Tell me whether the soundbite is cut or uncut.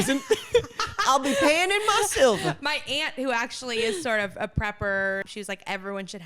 cut